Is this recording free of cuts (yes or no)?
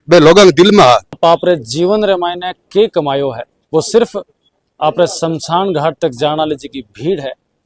no